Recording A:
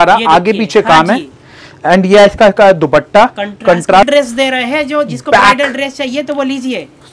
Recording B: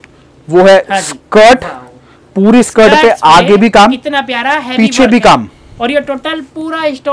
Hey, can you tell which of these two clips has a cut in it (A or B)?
A